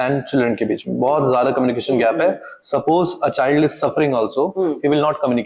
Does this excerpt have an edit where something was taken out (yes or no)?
no